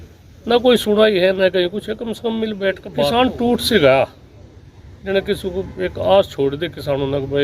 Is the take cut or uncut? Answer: cut